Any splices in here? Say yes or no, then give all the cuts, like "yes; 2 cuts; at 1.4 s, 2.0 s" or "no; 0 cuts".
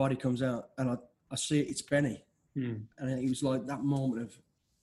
no; 0 cuts